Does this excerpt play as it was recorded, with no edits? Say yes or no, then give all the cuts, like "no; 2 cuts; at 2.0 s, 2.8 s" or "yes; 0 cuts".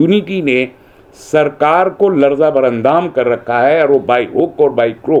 yes; 0 cuts